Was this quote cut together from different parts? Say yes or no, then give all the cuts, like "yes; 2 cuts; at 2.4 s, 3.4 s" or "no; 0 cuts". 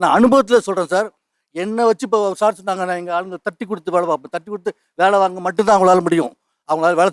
no; 0 cuts